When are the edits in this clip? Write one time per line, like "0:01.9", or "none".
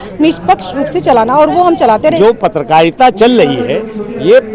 0:02.1